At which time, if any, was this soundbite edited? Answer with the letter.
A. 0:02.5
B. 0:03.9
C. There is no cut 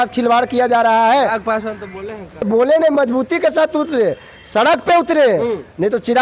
A